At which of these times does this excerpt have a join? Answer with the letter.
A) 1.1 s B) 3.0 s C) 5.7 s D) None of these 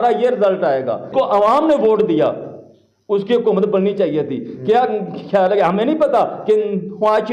A